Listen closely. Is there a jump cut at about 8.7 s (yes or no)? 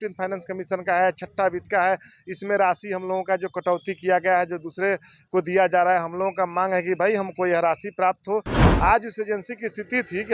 yes